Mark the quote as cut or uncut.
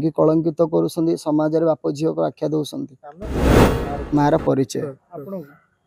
cut